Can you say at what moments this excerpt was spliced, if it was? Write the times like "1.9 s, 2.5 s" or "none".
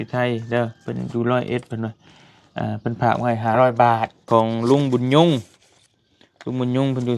4.2 s